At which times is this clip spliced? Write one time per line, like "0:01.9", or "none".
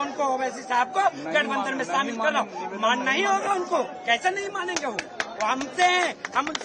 none